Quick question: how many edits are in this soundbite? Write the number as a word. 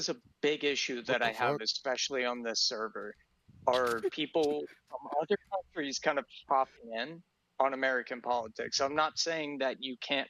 zero